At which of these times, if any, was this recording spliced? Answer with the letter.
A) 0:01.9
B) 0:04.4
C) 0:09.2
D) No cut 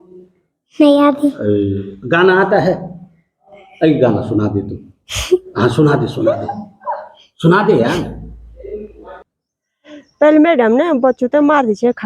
C